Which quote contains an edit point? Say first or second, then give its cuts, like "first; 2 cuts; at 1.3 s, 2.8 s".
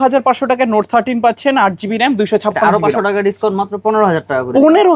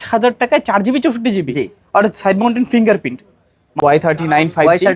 second; 1 cut; at 3.7 s